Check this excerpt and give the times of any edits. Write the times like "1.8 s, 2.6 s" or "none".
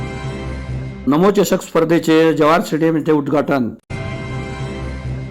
1.0 s

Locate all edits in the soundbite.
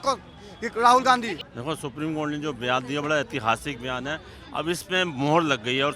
1.4 s

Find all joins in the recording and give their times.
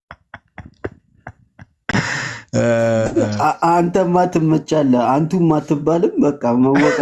none

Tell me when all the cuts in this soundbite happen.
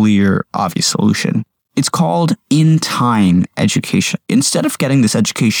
1.6 s, 4.3 s

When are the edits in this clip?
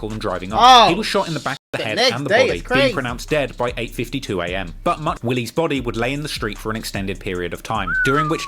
5.1 s

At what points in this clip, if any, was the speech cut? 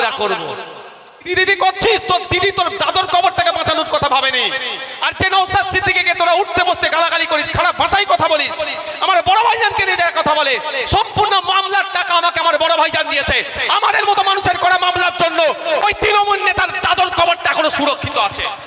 1.3 s

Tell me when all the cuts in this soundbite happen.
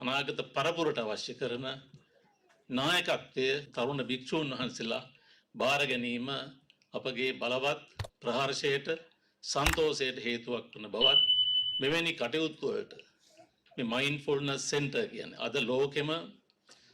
3.7 s

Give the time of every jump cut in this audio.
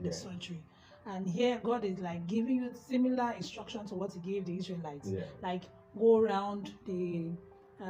none

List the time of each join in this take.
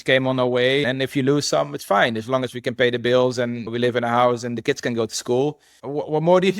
5.7 s

